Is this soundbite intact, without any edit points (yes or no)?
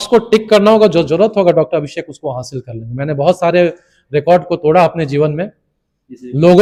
yes